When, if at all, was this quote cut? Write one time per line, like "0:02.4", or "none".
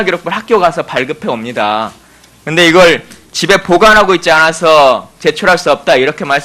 0:05.4